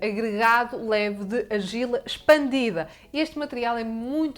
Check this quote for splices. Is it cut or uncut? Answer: cut